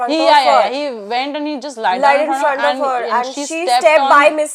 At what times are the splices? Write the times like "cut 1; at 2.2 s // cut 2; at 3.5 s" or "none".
none